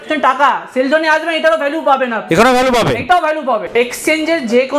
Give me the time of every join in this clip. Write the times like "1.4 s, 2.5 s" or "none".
none